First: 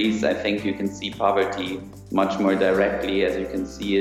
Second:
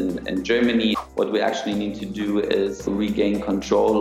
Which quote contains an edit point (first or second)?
second